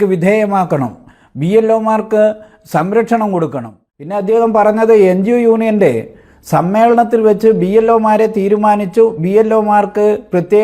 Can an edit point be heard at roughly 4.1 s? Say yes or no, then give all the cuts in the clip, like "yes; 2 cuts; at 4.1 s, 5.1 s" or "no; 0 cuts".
yes; 1 cut; at 4.1 s